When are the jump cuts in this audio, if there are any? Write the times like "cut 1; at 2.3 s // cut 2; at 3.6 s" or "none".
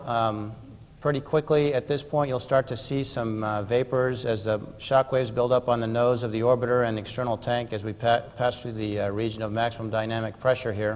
cut 1; at 4.0 s